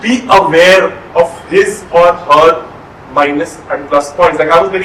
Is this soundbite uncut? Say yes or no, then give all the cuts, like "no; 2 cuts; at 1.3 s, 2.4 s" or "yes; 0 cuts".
yes; 0 cuts